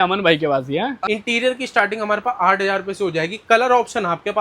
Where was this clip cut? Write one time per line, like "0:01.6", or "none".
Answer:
0:01.0